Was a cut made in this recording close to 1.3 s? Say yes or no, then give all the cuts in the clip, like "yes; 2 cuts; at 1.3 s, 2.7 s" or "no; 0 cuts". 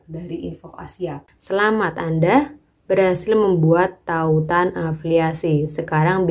yes; 1 cut; at 1.3 s